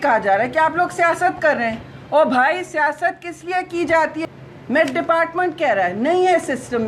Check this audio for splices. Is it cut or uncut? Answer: cut